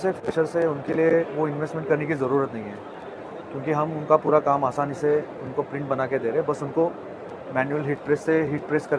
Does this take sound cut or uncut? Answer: uncut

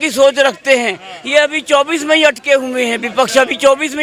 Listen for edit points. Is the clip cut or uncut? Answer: uncut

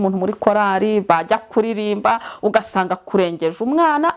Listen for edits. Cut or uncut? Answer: uncut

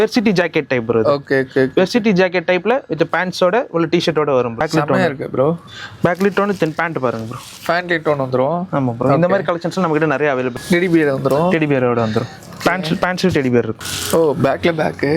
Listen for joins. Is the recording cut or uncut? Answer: cut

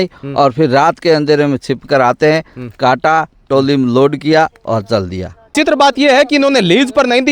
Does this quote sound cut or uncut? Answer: cut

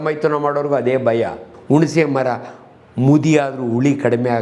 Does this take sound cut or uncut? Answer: cut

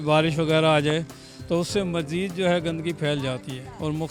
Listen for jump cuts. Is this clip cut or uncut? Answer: uncut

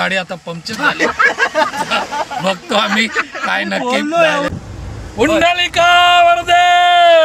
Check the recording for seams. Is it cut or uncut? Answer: cut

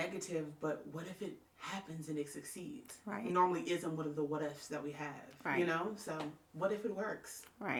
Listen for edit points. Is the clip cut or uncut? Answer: uncut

